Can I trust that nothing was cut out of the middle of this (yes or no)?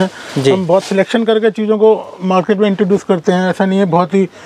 yes